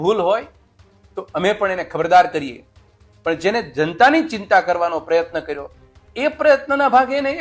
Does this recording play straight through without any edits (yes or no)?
yes